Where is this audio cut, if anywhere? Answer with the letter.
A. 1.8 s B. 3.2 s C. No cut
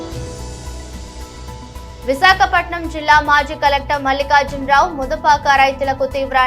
A